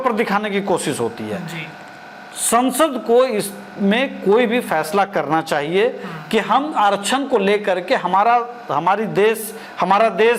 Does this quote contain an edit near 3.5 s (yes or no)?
no